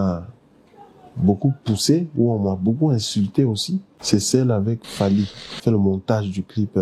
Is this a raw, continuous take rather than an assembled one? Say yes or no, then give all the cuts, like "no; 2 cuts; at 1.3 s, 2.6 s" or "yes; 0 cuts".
no; 2 cuts; at 3.9 s, 5.4 s